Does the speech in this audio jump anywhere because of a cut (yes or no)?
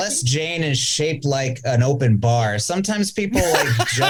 no